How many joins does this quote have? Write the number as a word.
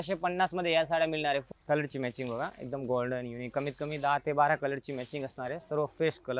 one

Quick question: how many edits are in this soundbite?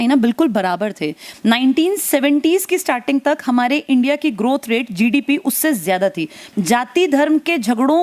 one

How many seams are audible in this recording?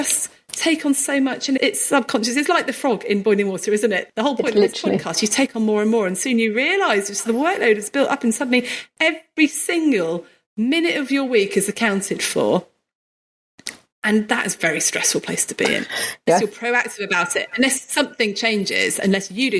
two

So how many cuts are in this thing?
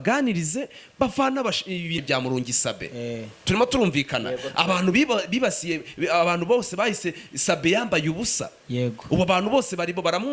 one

